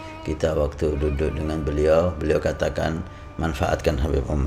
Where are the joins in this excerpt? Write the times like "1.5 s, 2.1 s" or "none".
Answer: none